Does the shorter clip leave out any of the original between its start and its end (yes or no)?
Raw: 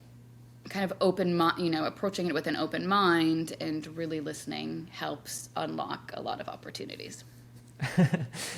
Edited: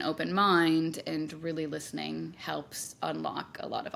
no